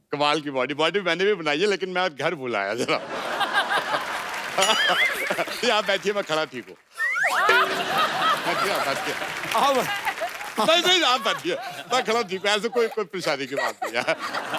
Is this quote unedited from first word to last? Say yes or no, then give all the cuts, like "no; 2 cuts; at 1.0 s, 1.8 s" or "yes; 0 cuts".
yes; 0 cuts